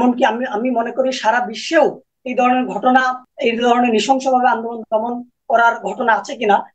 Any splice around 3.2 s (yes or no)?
yes